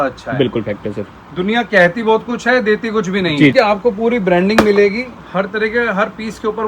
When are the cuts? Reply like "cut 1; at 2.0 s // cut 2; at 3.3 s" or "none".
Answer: cut 1; at 3.5 s